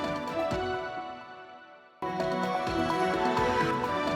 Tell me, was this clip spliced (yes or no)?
yes